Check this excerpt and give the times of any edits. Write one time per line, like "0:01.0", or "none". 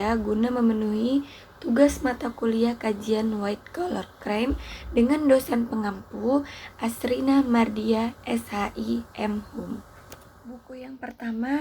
0:10.6